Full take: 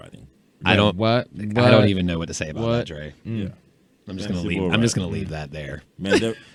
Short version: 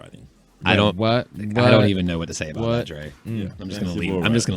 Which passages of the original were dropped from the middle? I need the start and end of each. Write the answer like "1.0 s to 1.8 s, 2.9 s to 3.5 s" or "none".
3.6 s to 4.1 s